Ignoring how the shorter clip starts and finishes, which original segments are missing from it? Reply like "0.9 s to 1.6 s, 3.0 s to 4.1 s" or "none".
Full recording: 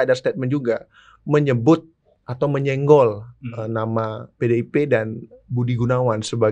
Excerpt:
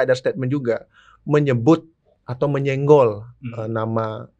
none